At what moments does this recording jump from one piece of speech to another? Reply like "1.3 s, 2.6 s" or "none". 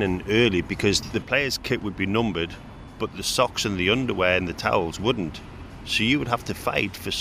none